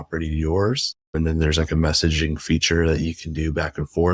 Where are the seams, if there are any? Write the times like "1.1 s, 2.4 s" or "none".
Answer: none